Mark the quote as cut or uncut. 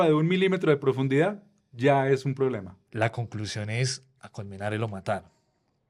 cut